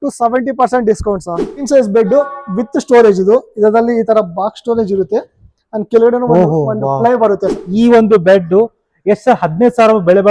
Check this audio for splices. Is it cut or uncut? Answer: cut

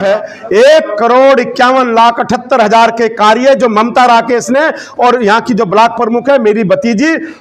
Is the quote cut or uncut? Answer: uncut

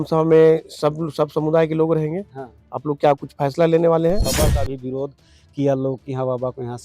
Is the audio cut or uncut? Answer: cut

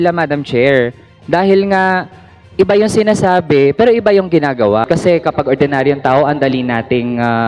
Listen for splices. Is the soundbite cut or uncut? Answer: cut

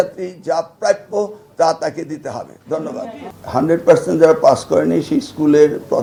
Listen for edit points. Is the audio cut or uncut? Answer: uncut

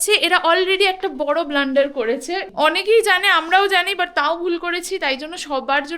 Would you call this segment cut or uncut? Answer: cut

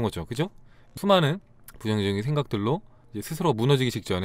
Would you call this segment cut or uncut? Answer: cut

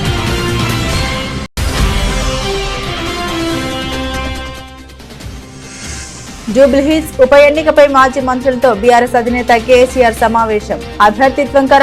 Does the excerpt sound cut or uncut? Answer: uncut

